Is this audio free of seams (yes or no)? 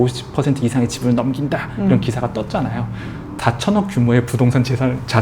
no